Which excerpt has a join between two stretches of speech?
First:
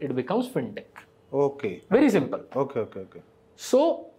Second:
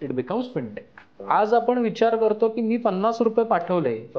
second; 1 cut; at 1.2 s

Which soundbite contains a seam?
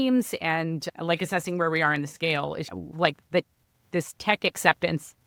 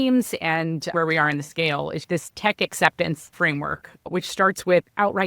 second; 3 cuts; at 0.9 s, 2.0 s, 3.3 s

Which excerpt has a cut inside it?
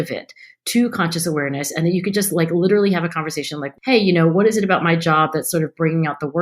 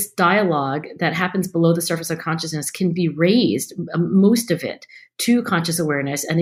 first; 1 cut; at 3.7 s

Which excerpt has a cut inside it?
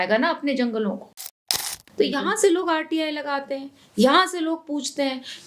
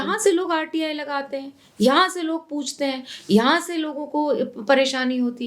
first; 1 cut; at 1.2 s

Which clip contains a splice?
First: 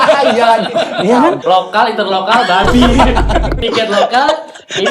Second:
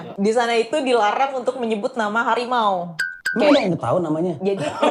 first; 2 cuts; at 1.4 s, 3.6 s

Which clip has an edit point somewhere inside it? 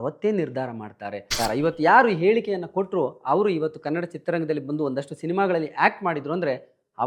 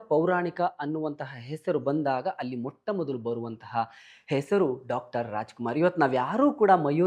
first; 1 cut; at 1.3 s

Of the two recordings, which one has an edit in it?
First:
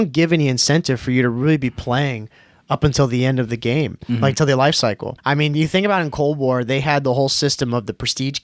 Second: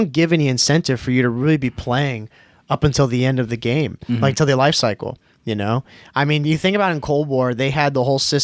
first; 1 cut; at 5.1 s

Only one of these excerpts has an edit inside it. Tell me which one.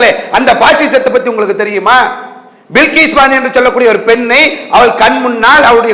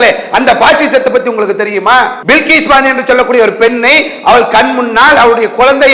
second; 1 cut; at 2.2 s

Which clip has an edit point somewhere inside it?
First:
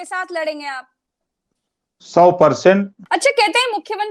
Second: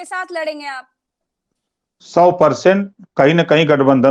first; 1 cut; at 3.0 s

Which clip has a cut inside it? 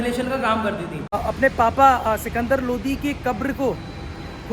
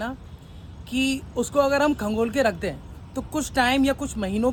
first; 1 cut; at 1.2 s

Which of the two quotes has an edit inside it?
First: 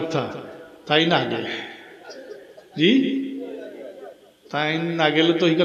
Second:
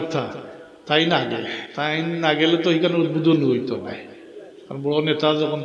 second; 1 cut; at 1.6 s

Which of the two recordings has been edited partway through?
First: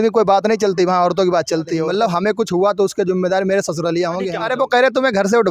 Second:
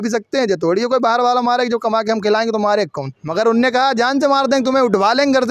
first; 2 cuts; at 1.9 s, 4.4 s

